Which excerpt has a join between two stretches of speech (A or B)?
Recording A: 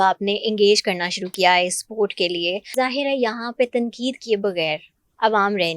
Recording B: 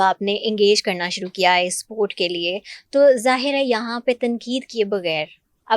A